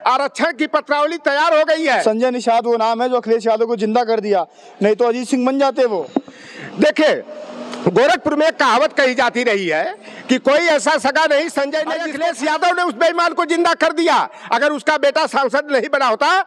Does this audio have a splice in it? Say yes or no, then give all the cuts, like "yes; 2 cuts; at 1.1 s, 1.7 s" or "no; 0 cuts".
yes; 2 cuts; at 2.0 s, 12.1 s